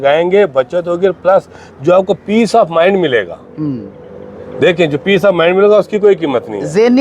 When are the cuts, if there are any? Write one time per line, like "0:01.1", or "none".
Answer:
none